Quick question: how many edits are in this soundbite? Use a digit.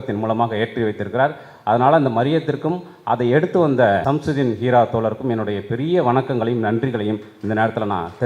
1